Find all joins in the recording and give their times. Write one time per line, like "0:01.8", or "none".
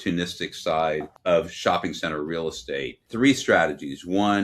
0:01.1
0:03.0